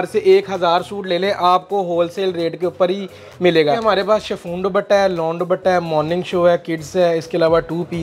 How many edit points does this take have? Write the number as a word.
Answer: one